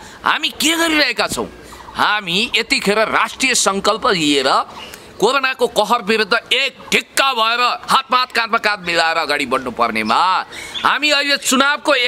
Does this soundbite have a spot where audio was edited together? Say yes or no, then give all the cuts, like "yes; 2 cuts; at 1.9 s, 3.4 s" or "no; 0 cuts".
no; 0 cuts